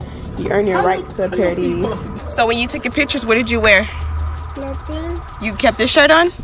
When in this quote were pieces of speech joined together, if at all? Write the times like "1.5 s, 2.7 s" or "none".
2.2 s

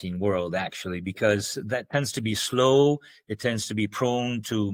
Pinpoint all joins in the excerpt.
none

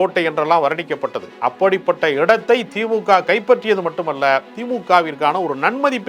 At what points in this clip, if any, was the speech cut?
1.3 s

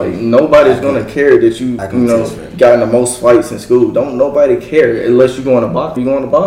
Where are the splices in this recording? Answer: none

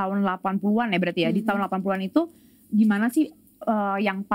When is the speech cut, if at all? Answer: none

